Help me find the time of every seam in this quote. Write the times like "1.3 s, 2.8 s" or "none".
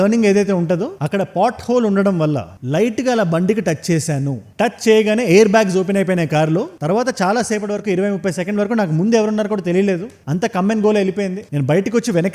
4.5 s